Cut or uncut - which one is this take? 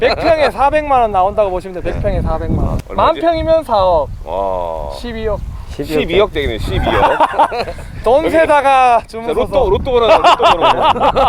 uncut